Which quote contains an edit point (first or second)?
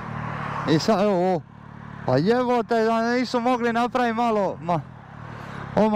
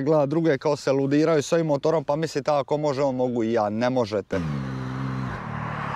second